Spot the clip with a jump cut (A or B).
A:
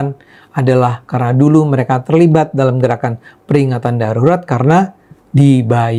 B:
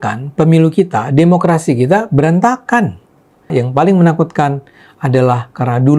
B